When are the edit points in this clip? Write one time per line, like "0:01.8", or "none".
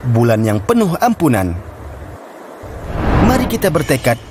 none